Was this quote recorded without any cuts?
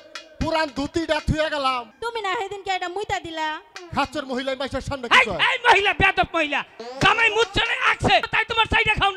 no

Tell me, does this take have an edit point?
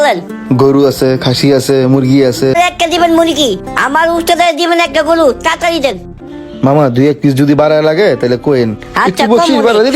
yes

